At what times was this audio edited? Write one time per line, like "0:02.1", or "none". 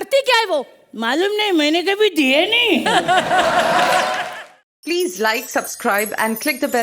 0:04.2

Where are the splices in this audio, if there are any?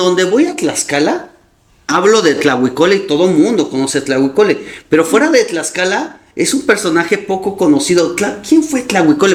none

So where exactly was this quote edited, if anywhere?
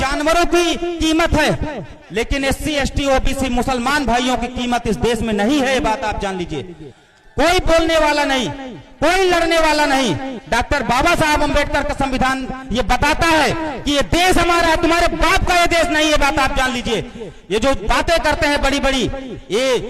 0:02.0

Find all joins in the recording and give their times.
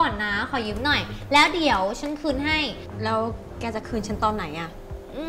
0:02.8

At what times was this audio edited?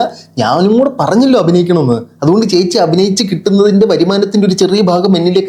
none

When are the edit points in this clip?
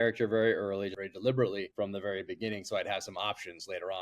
0:00.9
0:01.7

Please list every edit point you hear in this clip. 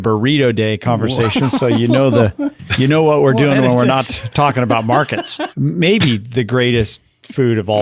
0:05.4

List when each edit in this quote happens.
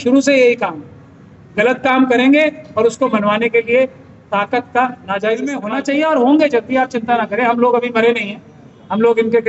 0:05.6

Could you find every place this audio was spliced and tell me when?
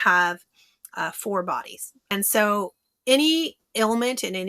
0:01.9

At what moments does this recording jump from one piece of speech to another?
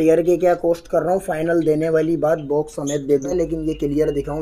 0:03.3

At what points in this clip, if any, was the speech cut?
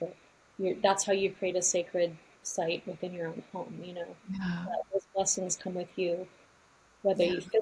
none

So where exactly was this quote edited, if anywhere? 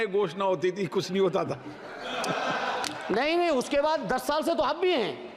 none

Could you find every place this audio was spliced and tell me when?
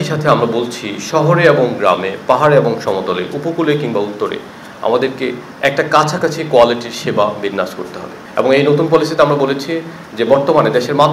none

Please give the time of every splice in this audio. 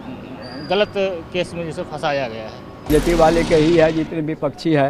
0:02.9

